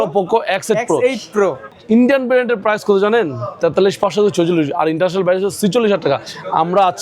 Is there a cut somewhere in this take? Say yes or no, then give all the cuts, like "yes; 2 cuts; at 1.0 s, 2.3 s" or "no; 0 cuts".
yes; 1 cut; at 1.7 s